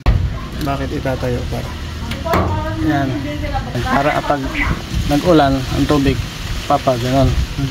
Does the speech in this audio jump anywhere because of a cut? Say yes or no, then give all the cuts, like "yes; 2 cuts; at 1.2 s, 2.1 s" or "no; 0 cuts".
yes; 1 cut; at 3.8 s